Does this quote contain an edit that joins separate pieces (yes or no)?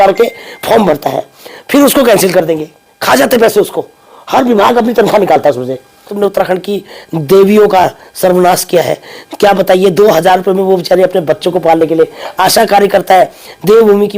yes